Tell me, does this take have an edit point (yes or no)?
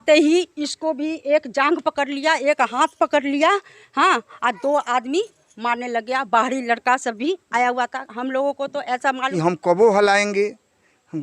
yes